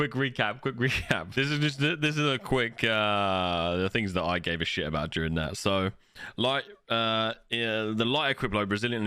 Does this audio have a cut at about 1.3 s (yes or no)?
yes